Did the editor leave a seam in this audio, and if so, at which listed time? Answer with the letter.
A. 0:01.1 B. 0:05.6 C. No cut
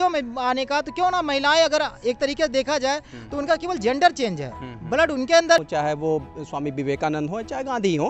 B